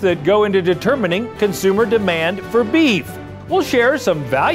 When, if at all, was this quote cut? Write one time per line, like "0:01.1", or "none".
0:03.3